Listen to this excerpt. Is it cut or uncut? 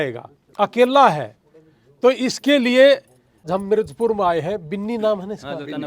cut